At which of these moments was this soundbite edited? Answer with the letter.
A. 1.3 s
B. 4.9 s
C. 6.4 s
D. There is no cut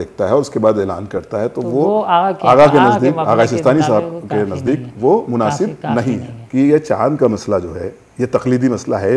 C